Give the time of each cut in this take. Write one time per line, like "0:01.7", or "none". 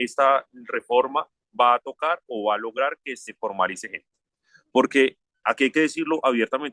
0:04.4